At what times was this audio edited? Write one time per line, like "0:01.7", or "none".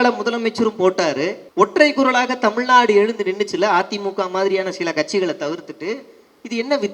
0:01.4